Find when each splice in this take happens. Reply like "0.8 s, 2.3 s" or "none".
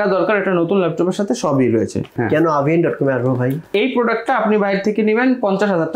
2.2 s, 3.7 s

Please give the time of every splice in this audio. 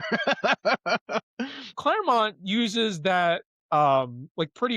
1.7 s

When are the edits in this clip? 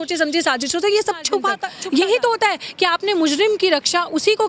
1.6 s

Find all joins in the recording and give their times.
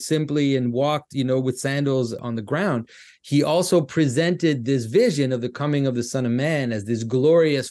2.2 s

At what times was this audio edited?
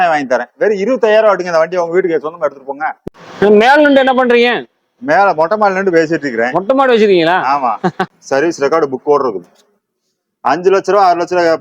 2.9 s, 8.1 s

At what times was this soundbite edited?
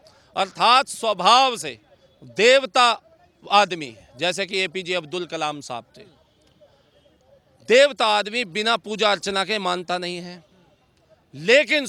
none

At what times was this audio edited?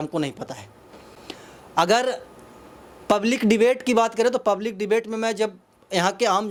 none

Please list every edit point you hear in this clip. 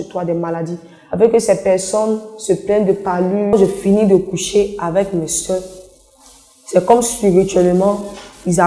3.5 s

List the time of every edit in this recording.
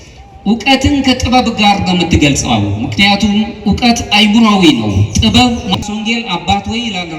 5.8 s

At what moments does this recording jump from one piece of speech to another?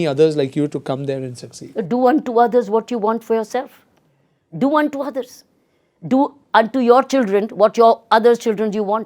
none

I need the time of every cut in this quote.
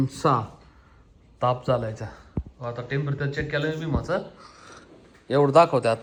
none

